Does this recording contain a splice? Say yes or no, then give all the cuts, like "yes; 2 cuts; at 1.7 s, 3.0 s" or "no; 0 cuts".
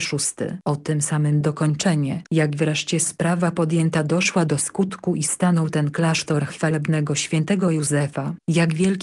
no; 0 cuts